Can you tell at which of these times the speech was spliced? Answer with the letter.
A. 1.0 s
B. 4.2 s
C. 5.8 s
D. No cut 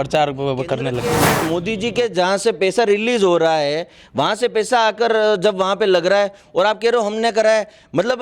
A